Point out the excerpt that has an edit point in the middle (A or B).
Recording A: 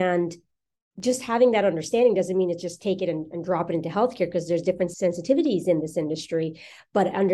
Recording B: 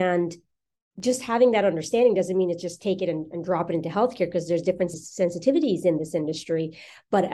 A